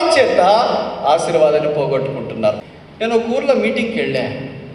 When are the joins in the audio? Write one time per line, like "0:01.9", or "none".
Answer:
0:02.6